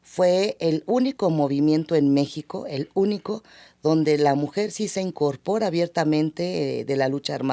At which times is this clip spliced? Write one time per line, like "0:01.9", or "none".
none